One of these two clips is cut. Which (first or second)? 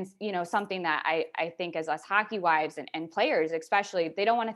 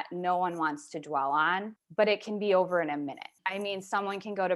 second